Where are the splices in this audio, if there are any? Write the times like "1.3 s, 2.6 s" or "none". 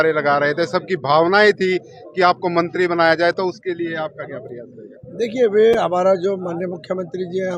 none